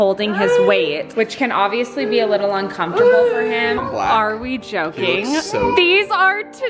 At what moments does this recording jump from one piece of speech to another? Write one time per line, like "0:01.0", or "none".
0:01.1
0:03.8